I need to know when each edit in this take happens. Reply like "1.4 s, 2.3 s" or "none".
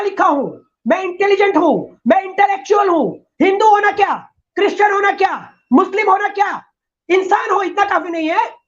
none